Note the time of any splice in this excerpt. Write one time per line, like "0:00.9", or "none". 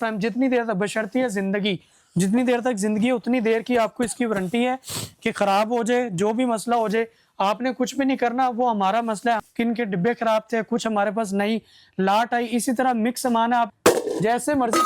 0:09.4
0:13.7